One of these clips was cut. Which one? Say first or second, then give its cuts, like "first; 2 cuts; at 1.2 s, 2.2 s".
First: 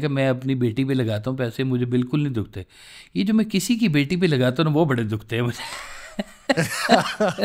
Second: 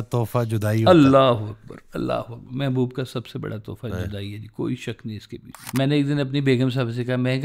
second; 2 cuts; at 0.8 s, 5.7 s